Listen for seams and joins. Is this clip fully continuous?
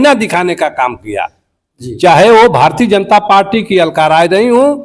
yes; 0 cuts

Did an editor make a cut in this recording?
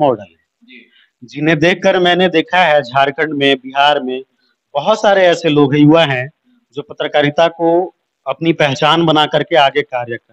no; 0 cuts

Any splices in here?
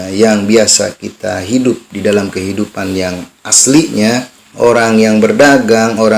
yes; 1 cut; at 4.4 s

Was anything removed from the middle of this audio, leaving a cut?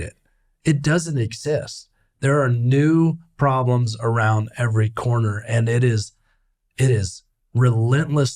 no; 0 cuts

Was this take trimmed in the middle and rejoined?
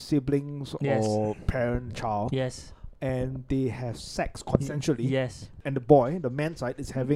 yes; 1 cut; at 5.6 s

